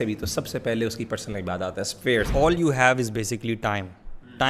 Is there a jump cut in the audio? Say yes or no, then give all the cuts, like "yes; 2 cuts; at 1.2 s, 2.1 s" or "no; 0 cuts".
yes; 1 cut; at 2.3 s